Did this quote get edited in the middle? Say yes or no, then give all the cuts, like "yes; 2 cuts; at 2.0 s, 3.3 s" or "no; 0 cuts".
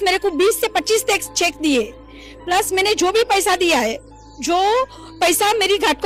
no; 0 cuts